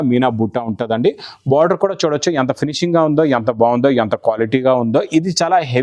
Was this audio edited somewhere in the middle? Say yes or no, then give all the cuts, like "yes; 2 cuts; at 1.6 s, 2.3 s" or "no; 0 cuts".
no; 0 cuts